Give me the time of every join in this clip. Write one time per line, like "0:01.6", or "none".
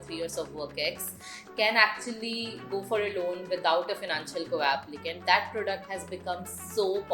none